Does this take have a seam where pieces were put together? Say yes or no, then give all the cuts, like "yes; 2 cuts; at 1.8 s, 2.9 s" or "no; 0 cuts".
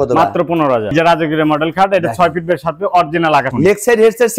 yes; 2 cuts; at 0.9 s, 3.5 s